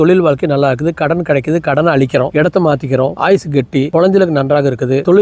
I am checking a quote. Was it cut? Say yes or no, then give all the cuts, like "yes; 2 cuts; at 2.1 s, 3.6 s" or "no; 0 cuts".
no; 0 cuts